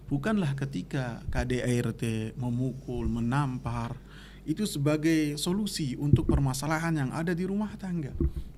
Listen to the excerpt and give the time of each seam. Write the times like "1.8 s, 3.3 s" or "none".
none